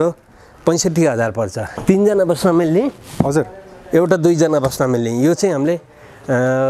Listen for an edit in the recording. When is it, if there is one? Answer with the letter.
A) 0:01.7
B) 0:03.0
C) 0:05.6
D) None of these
A